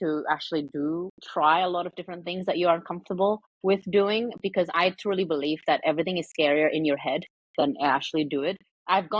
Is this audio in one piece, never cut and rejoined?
yes; 0 cuts

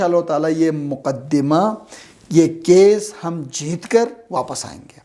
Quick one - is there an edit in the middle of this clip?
no; 0 cuts

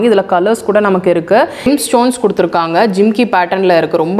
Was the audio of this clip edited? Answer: yes; 1 cut; at 1.7 s

